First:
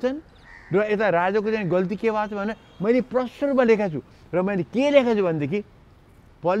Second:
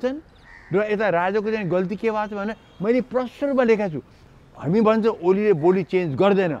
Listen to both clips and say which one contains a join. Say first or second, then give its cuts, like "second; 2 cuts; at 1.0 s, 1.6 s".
second; 1 cut; at 4.2 s